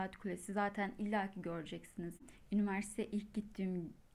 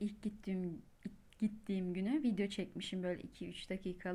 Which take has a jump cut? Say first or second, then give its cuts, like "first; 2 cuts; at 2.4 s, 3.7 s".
first; 1 cut; at 2.2 s